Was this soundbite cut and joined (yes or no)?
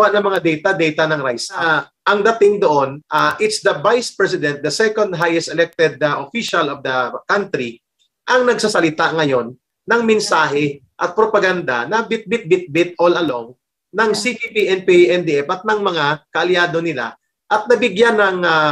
yes